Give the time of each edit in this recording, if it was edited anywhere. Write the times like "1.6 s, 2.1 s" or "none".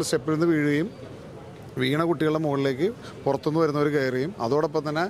none